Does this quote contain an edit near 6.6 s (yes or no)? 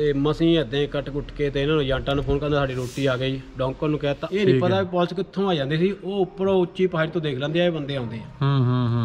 no